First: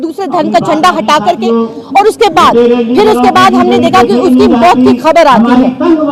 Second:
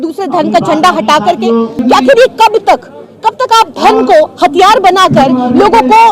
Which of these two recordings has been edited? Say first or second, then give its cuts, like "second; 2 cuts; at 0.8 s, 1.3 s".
second; 1 cut; at 1.8 s